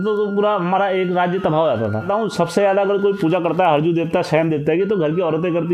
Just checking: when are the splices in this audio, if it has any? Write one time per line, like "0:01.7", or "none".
0:02.1